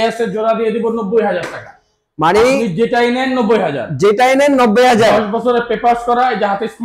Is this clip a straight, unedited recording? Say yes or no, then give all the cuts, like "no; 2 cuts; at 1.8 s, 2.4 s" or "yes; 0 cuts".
yes; 0 cuts